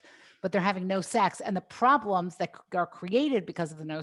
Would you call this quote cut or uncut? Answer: uncut